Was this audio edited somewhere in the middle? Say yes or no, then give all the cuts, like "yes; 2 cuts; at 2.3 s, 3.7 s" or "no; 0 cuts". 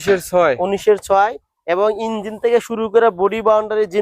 no; 0 cuts